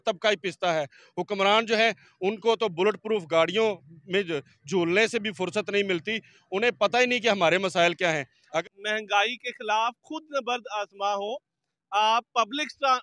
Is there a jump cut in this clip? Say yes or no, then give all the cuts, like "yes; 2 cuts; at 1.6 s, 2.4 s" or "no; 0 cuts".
yes; 1 cut; at 8.6 s